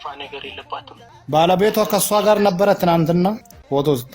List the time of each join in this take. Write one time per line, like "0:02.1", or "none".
0:01.1

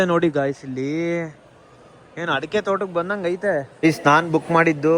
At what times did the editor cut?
0:03.7

